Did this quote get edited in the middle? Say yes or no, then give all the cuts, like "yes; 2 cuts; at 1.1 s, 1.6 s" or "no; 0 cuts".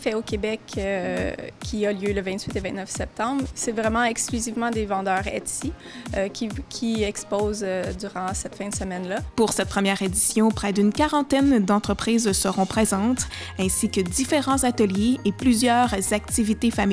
yes; 1 cut; at 9.3 s